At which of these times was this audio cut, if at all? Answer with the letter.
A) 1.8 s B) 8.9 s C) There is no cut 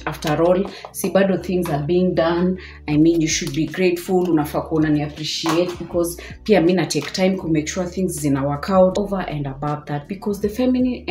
B